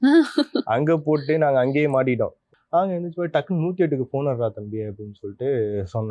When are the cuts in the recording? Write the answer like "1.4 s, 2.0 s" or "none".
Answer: 2.4 s